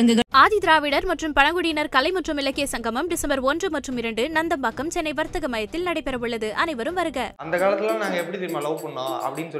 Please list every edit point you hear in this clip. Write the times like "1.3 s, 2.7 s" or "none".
7.3 s

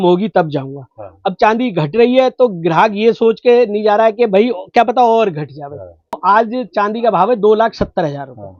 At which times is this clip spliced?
6.2 s

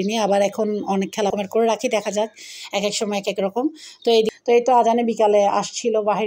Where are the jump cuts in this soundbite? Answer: 1.3 s, 4.3 s

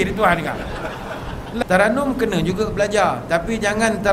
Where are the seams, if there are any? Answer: 1.4 s

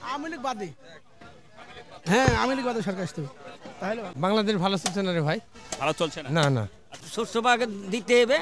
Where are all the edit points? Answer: 4.1 s, 7.0 s

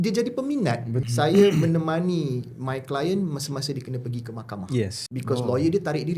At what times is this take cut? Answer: 0.9 s, 5.1 s

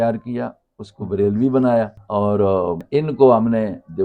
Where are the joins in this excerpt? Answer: 2.0 s, 2.8 s

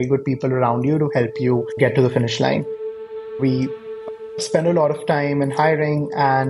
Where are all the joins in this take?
none

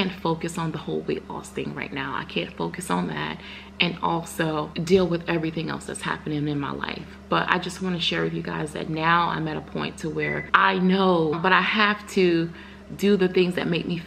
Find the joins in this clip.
4.7 s, 10.4 s, 11.4 s

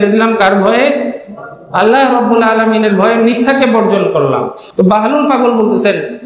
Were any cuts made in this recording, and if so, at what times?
4.6 s

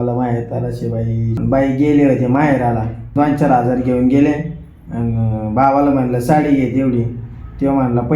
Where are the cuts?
1.3 s, 3.1 s

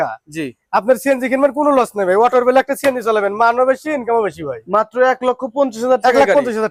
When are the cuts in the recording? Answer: none

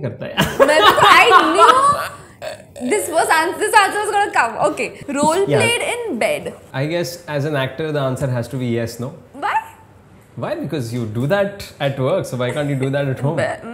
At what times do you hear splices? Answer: 5.0 s, 6.6 s

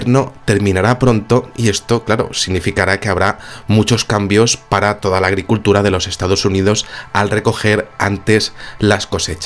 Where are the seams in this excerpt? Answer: 5.0 s

